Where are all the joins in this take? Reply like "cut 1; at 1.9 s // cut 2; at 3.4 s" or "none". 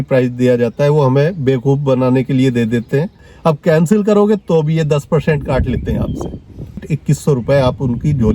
cut 1; at 3.3 s // cut 2; at 6.9 s